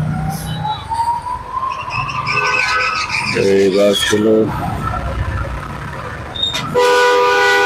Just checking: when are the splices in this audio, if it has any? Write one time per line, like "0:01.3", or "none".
none